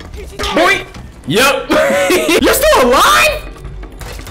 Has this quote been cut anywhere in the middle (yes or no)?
yes